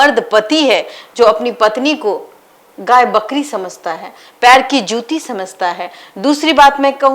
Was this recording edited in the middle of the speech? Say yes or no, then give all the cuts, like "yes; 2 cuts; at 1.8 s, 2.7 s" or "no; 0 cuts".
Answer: no; 0 cuts